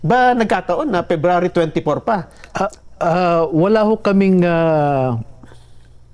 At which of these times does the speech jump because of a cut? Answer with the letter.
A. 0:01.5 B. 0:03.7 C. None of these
C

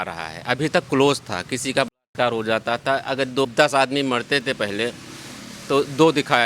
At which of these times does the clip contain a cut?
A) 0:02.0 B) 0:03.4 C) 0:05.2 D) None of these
B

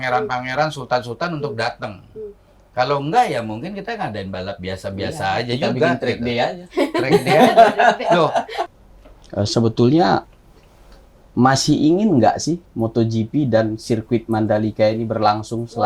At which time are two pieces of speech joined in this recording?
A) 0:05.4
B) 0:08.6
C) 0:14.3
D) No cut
B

